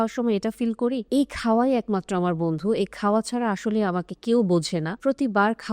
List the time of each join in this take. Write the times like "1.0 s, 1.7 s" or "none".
1.0 s, 4.9 s